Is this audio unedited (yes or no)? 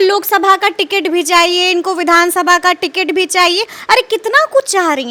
yes